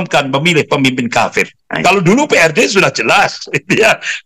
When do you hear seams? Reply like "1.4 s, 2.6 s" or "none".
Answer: 1.7 s